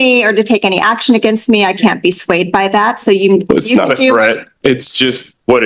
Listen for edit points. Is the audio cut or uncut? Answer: uncut